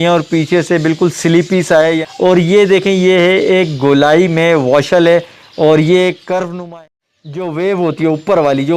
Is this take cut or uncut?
cut